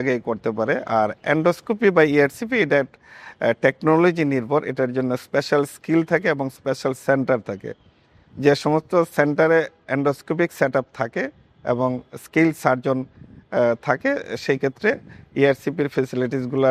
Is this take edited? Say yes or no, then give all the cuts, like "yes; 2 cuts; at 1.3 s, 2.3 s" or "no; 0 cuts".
no; 0 cuts